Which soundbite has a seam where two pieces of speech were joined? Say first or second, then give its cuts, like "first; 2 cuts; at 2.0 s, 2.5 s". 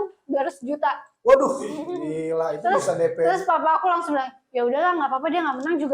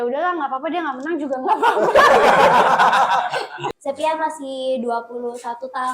second; 1 cut; at 3.7 s